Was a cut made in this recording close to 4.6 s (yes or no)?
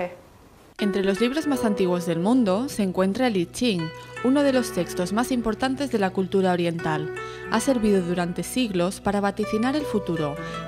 yes